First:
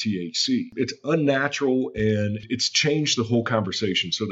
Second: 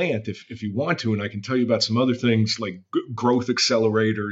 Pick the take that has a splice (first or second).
first